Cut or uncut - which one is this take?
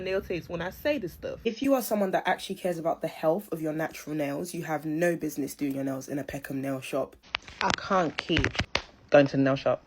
cut